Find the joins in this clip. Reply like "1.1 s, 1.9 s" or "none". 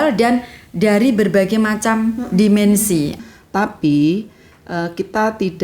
3.2 s